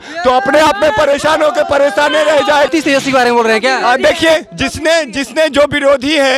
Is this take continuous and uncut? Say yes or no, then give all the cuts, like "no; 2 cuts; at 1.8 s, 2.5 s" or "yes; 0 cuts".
no; 1 cut; at 2.7 s